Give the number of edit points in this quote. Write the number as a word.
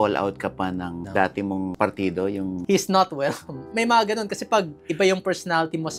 three